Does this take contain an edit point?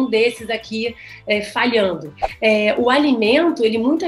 yes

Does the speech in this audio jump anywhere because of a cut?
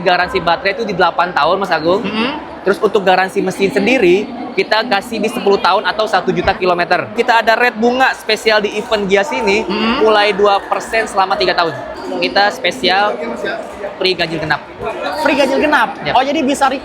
yes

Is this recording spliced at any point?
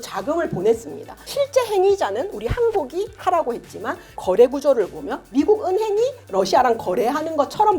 yes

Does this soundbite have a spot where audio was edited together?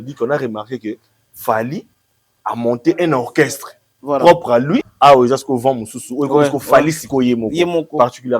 yes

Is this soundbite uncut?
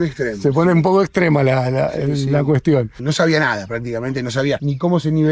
no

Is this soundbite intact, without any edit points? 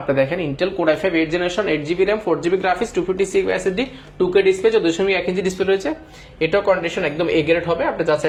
yes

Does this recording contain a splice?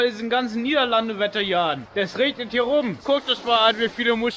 yes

